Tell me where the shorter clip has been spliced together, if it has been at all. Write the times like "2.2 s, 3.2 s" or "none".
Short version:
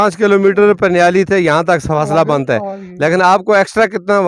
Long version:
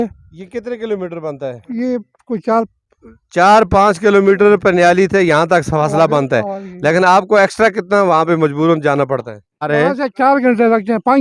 none